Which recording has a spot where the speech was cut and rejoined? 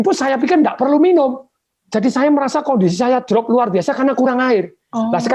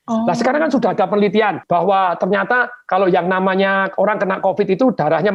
second; 1 cut; at 1.6 s

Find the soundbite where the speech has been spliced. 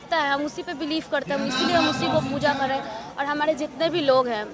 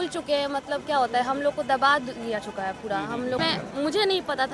second; 1 cut; at 3.4 s

